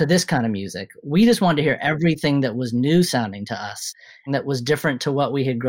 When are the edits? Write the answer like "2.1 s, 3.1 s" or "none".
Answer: 4.0 s